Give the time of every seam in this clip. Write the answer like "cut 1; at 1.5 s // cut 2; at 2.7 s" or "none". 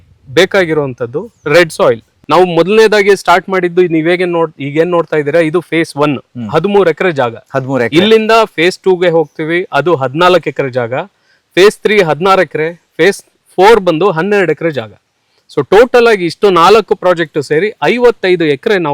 cut 1; at 2.1 s